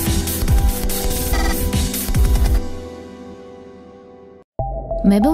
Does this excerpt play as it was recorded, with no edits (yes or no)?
no